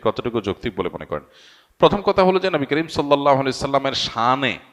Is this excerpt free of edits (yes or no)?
yes